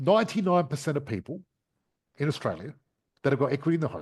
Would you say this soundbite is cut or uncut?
uncut